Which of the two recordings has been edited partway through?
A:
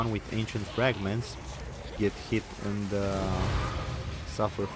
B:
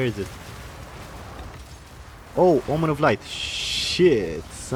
A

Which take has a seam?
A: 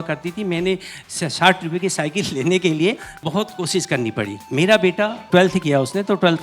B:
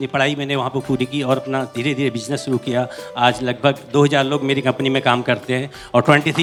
A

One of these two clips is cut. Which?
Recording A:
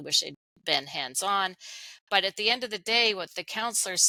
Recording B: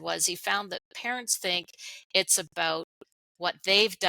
B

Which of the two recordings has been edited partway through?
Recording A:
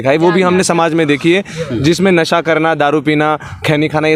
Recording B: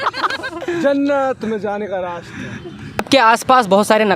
B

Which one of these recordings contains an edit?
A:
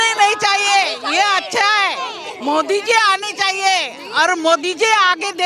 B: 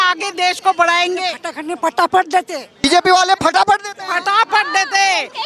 B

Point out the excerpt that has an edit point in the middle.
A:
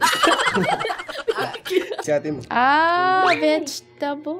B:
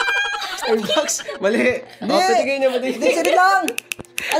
A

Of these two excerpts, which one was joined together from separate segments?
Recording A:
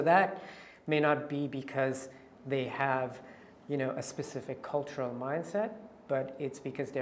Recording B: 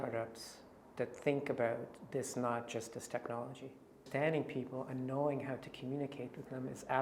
B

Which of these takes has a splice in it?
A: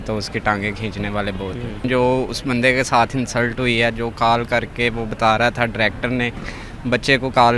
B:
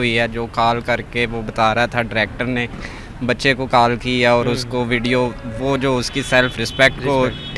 A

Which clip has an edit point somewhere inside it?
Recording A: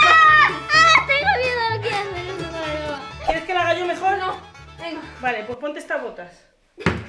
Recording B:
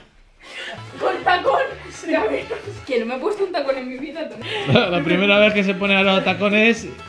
B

